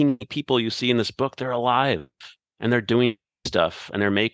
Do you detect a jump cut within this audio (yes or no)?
no